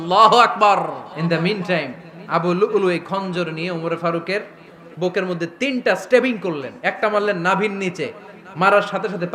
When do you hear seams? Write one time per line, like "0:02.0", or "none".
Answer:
0:01.1